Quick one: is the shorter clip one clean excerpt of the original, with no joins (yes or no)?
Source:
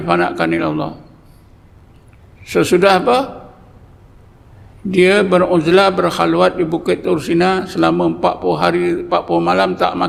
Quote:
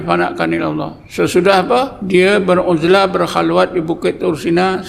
no